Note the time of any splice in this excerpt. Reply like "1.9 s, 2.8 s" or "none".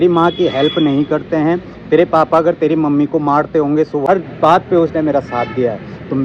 4.0 s